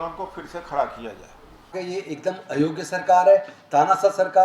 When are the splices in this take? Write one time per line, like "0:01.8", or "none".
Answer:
0:01.7